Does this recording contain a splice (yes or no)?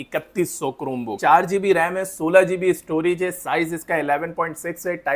yes